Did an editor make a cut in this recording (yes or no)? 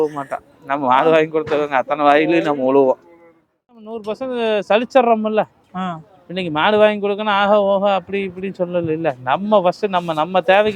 yes